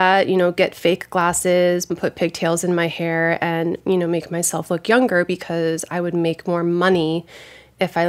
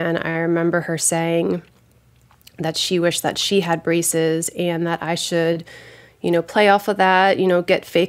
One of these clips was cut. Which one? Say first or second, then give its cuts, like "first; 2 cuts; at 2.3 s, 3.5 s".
first; 1 cut; at 1.9 s